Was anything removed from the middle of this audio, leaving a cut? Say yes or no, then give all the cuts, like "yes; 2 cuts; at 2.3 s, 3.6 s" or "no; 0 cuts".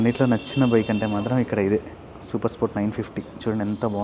no; 0 cuts